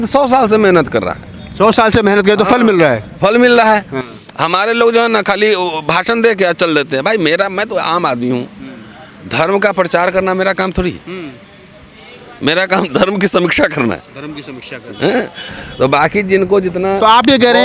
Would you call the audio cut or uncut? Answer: uncut